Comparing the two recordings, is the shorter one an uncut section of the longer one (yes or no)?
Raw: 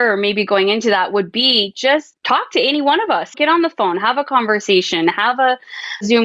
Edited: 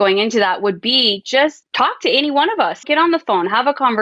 yes